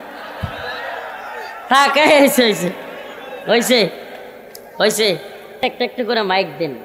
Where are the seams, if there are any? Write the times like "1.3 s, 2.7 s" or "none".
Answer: 5.4 s